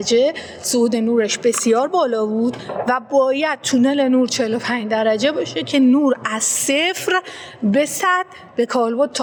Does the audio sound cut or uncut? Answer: uncut